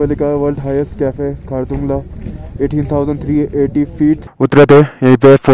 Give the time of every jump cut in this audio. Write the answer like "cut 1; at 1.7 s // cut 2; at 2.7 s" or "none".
cut 1; at 4.3 s

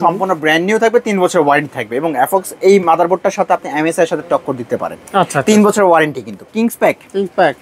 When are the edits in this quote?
cut 1; at 6.5 s

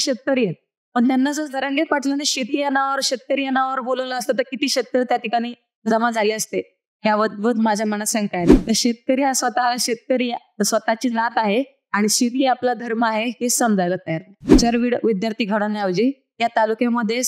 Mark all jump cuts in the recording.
cut 1; at 8.6 s // cut 2; at 14.6 s

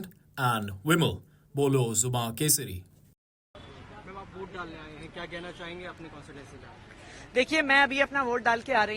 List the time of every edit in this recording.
cut 1; at 3.5 s

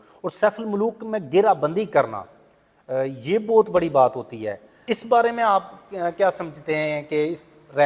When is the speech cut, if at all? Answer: none

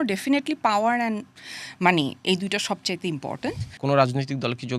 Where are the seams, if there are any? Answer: cut 1; at 3.7 s

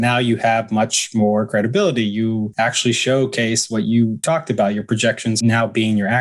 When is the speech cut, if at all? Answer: cut 1; at 2.5 s // cut 2; at 4.2 s // cut 3; at 5.4 s

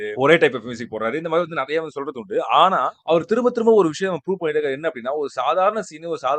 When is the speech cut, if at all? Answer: none

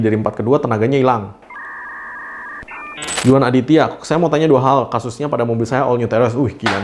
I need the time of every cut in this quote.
cut 1; at 3.0 s

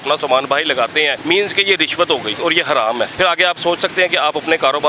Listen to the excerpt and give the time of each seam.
cut 1; at 1.2 s // cut 2; at 2.4 s // cut 3; at 3.1 s

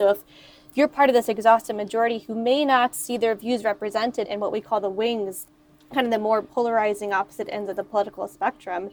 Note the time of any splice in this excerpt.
cut 1; at 4.2 s // cut 2; at 5.4 s

